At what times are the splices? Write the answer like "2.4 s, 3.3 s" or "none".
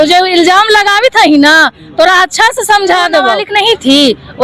3.4 s